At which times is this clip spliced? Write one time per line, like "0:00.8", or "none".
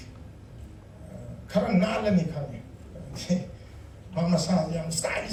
none